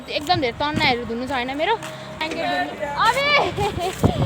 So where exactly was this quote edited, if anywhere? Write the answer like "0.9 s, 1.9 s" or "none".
2.2 s